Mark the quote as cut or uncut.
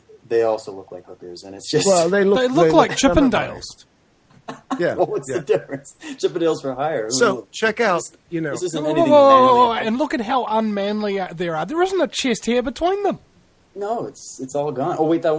cut